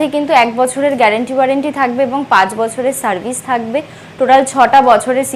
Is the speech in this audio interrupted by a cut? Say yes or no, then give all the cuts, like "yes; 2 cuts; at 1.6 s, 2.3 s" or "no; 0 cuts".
no; 0 cuts